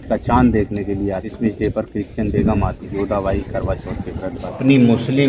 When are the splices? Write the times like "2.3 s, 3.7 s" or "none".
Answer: 1.3 s, 2.9 s, 4.5 s